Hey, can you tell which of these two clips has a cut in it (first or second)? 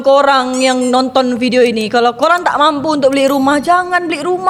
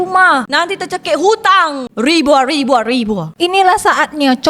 second